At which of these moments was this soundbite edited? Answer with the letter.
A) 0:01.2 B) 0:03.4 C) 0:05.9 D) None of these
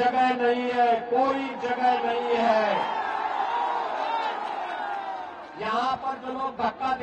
D